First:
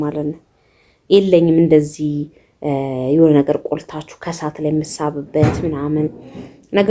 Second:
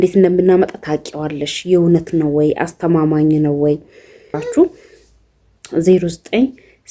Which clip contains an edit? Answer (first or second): second